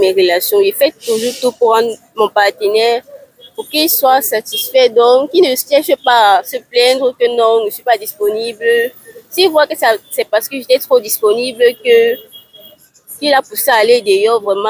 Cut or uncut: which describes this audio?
uncut